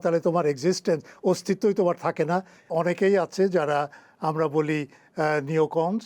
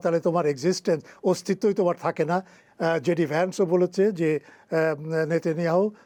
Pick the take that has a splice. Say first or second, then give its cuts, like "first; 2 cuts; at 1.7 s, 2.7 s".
first; 1 cut; at 2.7 s